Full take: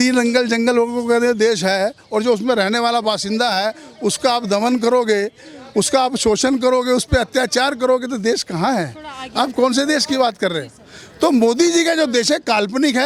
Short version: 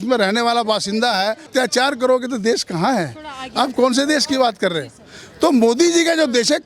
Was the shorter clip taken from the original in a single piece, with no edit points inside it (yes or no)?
no